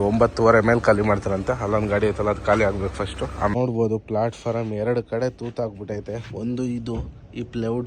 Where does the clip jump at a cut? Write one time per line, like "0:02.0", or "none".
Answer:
0:03.5